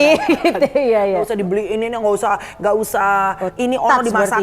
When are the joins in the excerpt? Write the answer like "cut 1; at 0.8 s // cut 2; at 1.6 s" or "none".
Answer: cut 1; at 1.3 s

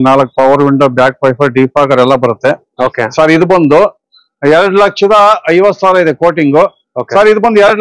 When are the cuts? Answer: none

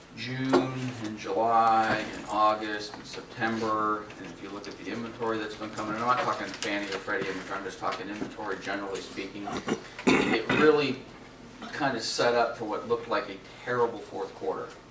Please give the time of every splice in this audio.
none

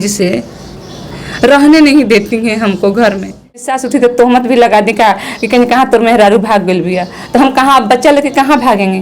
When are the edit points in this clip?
cut 1; at 3.8 s

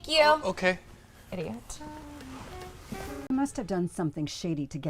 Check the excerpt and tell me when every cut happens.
cut 1; at 3.3 s

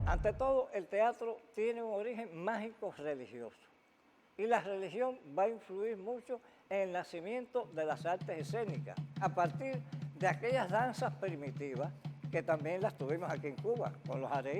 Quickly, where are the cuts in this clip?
cut 1; at 9.2 s

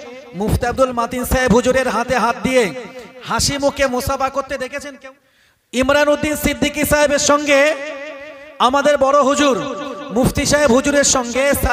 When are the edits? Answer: cut 1; at 5.0 s

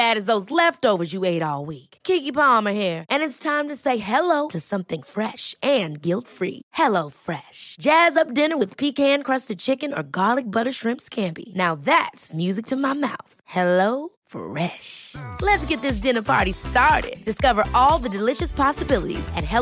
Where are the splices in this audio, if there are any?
none

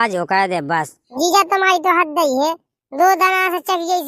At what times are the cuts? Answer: cut 1; at 1.1 s

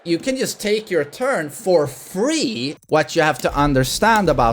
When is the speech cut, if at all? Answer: cut 1; at 2.7 s

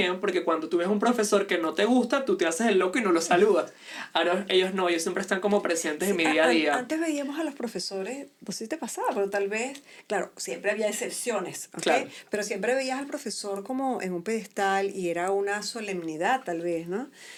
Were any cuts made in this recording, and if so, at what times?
none

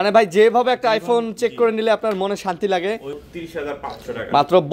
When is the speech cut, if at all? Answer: cut 1; at 3.2 s

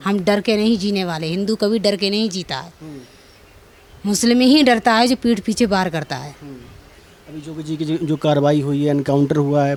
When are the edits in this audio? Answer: none

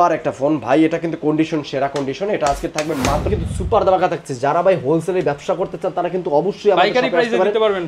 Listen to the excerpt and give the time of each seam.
cut 1; at 3.3 s

